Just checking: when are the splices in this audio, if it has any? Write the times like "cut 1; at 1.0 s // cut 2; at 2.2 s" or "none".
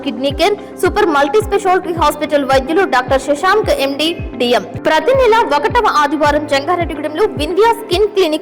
cut 1; at 4.7 s